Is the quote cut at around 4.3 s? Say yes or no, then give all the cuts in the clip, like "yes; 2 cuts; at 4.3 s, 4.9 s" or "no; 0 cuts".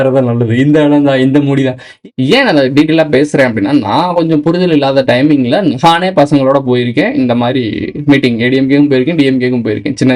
no; 1 cut; at 1.8 s